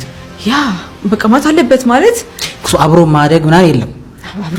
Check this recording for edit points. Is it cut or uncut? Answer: uncut